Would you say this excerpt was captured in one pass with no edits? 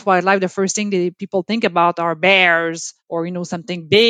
no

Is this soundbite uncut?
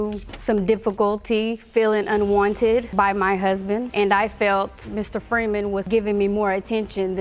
yes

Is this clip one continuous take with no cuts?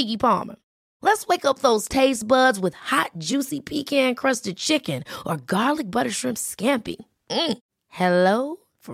yes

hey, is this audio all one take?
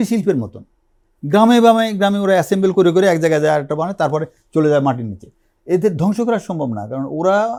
yes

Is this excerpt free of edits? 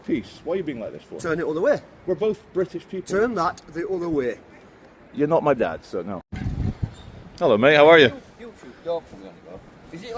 no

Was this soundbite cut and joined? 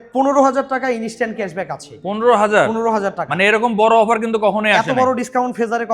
no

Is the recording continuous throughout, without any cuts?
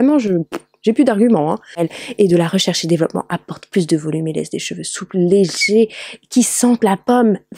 no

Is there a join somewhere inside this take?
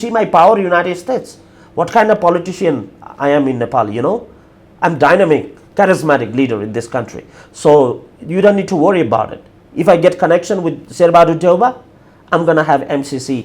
no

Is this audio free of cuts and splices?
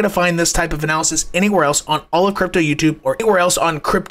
yes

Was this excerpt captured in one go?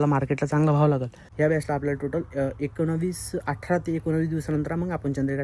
no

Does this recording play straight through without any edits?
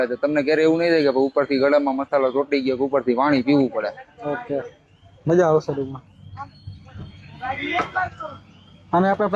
yes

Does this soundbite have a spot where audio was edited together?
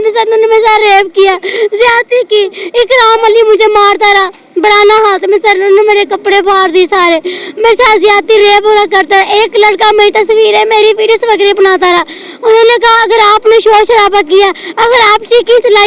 no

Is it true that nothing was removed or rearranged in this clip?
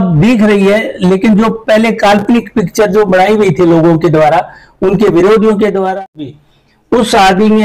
no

